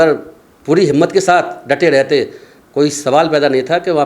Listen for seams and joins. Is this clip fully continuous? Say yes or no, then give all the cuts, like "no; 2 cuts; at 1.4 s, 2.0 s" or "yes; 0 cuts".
yes; 0 cuts